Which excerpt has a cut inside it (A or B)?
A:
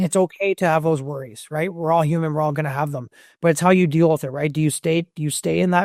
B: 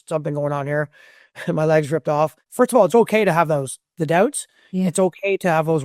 B